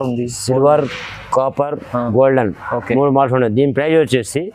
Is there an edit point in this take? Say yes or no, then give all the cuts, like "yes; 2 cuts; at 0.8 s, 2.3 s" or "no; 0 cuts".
no; 0 cuts